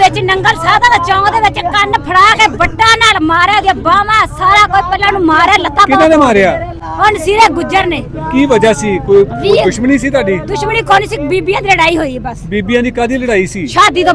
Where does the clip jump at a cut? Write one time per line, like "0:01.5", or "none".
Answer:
none